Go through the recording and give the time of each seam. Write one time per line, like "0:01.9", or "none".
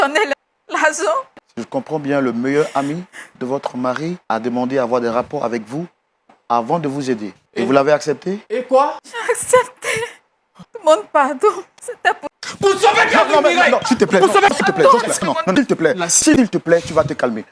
none